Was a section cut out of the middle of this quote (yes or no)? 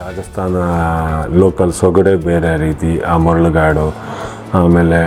no